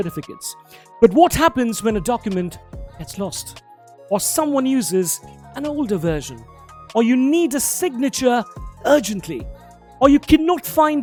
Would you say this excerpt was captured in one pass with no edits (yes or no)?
yes